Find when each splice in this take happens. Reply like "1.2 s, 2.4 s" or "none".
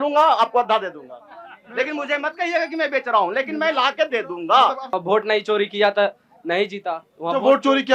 4.9 s